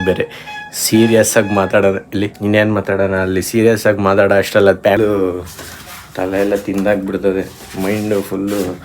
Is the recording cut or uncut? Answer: cut